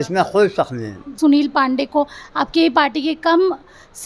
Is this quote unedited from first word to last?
no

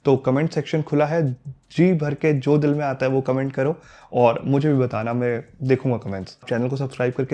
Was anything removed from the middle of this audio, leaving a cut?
yes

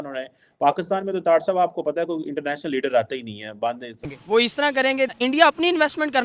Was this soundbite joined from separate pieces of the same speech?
yes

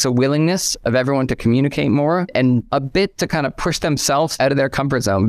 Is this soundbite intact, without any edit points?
no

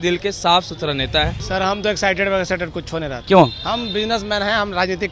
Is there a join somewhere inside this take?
yes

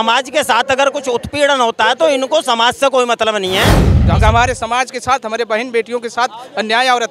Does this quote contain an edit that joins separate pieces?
yes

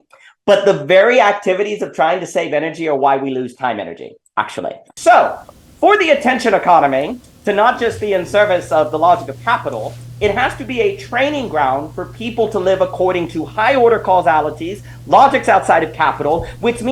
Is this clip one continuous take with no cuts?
no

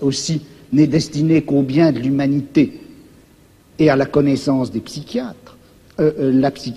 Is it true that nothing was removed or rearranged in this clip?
yes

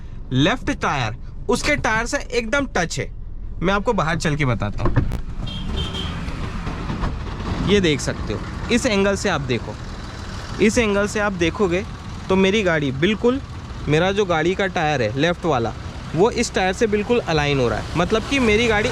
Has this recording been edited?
no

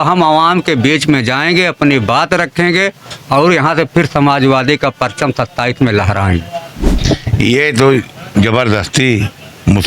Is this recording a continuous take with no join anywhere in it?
no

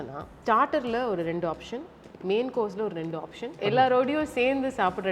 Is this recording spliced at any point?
yes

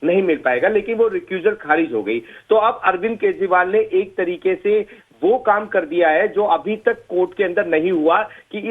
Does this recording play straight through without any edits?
no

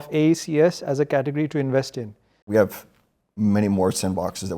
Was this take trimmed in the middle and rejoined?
yes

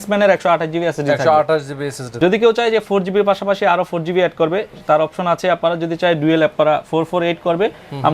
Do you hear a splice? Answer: yes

